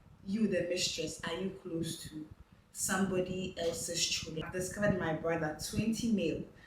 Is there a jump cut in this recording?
yes; 1 cut; at 4.3 s

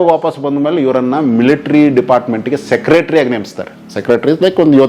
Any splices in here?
no; 0 cuts

